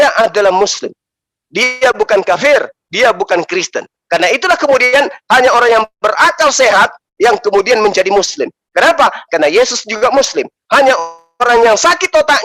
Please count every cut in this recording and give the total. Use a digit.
0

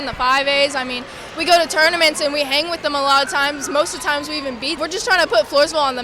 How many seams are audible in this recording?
1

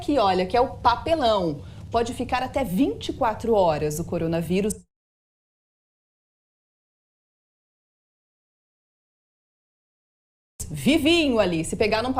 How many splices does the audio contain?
0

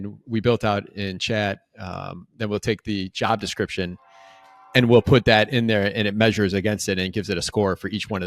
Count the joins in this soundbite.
0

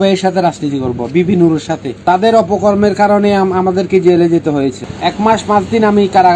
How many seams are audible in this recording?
2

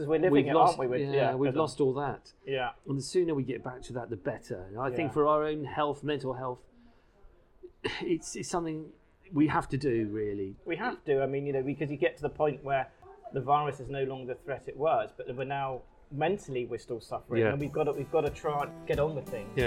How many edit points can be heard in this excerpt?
1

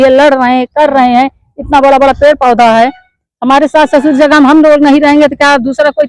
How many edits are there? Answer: 0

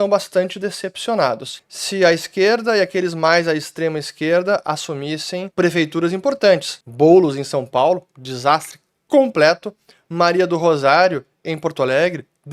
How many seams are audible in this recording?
3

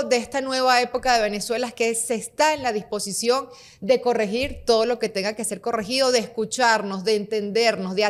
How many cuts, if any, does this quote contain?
0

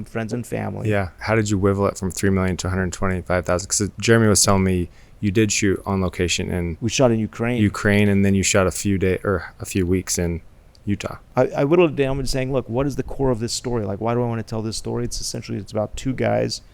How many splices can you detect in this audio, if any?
3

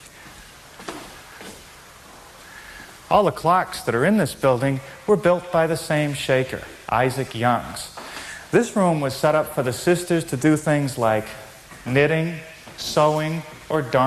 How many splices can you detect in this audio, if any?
1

